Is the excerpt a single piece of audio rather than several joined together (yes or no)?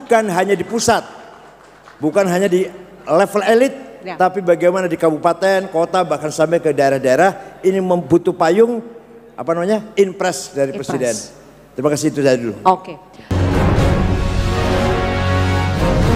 no